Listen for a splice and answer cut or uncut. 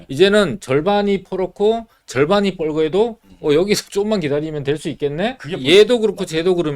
cut